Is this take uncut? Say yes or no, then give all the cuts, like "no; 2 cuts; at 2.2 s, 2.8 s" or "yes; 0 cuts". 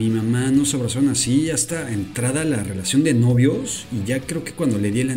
yes; 0 cuts